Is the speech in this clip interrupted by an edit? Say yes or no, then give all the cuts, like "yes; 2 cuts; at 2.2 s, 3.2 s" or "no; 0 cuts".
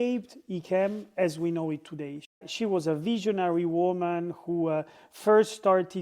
yes; 1 cut; at 2.4 s